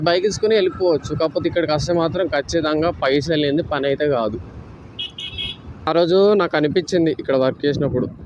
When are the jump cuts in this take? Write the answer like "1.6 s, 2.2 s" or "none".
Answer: 5.8 s